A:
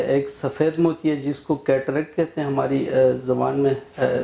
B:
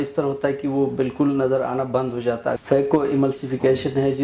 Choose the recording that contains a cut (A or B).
B